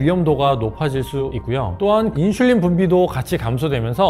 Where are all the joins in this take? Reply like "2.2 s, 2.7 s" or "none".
2.1 s